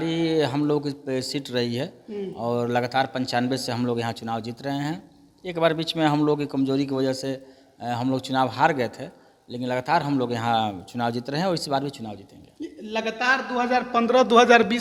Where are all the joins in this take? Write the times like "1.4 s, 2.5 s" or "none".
none

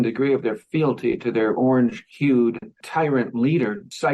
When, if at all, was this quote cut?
2.1 s

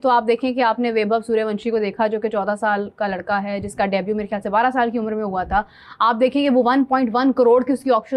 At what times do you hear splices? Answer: none

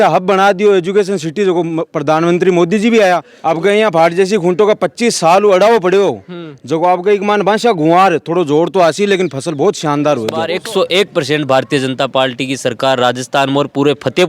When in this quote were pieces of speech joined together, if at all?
3.3 s, 10.5 s

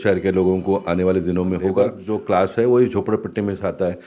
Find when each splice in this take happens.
2.2 s

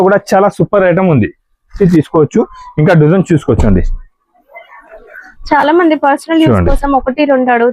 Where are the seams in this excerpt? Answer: 1.7 s

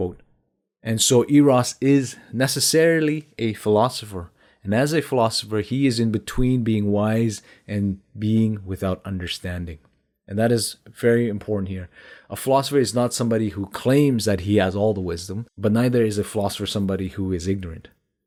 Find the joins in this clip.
none

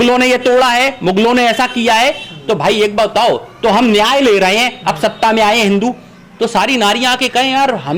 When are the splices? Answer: none

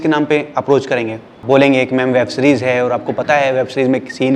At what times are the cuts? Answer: 1.4 s

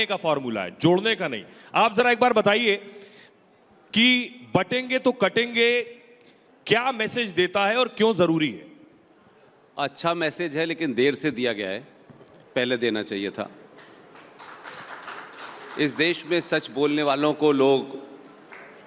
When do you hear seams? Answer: none

